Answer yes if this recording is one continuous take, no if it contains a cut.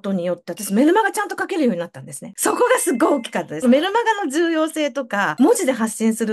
yes